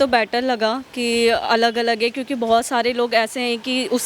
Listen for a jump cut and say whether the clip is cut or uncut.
uncut